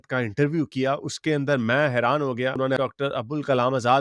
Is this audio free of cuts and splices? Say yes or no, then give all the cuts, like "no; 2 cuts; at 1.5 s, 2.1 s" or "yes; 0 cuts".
yes; 0 cuts